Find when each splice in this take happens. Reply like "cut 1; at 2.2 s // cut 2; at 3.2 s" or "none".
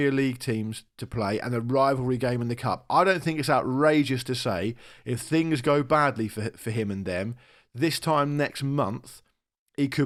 none